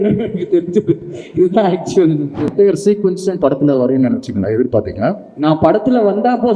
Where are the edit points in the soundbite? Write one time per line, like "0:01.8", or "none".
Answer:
0:02.5